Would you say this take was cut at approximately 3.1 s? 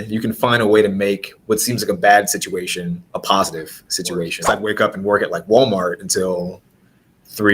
yes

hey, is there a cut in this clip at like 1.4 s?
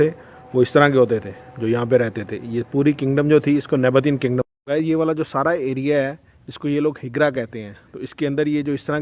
no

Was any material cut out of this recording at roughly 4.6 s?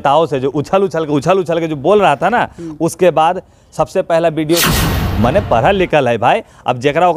yes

